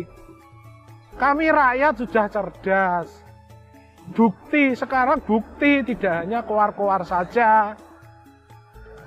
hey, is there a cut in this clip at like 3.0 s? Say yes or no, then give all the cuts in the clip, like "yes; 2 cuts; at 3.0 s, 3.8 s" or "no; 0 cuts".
no; 0 cuts